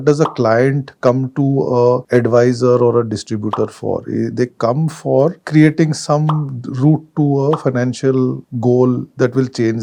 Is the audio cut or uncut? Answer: uncut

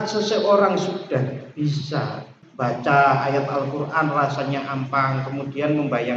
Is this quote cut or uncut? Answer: cut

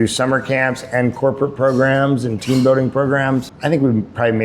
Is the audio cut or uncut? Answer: cut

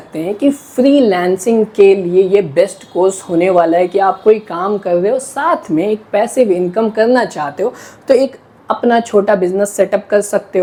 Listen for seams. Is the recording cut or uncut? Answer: uncut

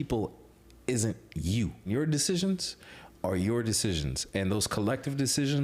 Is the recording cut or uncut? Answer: cut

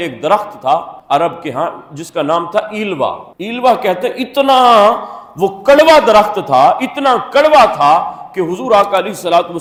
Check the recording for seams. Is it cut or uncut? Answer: uncut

